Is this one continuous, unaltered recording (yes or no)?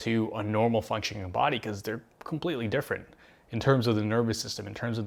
yes